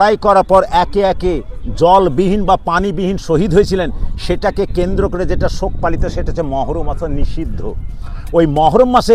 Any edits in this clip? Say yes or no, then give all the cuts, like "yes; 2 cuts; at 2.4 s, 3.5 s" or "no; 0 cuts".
no; 0 cuts